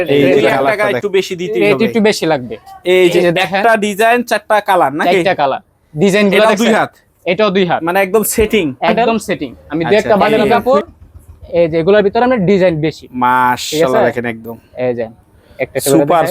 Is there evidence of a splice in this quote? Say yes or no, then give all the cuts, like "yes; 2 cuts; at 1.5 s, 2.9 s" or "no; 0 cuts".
yes; 2 cuts; at 0.7 s, 10.2 s